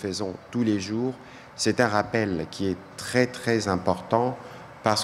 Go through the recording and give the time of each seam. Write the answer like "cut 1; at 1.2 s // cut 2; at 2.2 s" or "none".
none